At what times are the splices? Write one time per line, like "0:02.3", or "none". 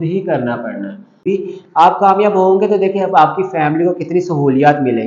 0:01.2